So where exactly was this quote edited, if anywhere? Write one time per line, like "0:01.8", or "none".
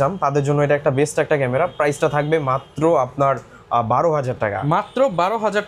none